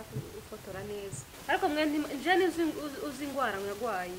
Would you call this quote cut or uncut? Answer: cut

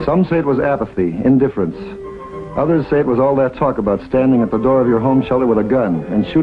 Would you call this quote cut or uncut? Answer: cut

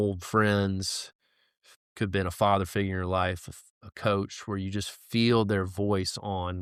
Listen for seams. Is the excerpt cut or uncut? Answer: uncut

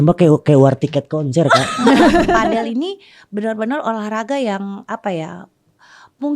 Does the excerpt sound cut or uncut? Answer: cut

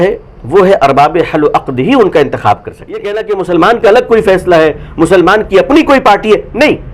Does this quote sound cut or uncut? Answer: cut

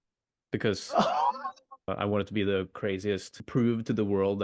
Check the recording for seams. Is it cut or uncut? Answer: cut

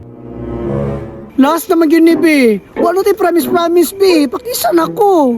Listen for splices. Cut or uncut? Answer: cut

